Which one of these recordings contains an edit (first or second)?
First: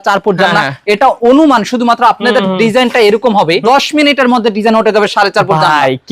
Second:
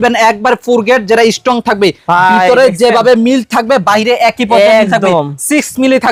first